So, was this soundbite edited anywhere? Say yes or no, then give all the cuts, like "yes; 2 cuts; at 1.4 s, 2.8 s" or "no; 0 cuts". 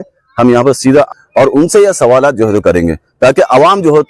yes; 1 cut; at 1.1 s